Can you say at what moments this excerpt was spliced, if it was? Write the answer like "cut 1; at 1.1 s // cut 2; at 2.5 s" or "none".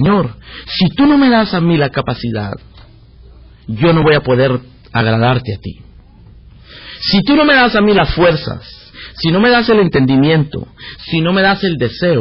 none